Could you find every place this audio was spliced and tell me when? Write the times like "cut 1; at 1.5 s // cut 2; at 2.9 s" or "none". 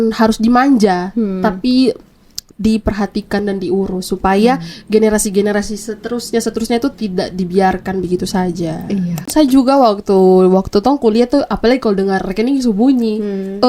cut 1; at 9.3 s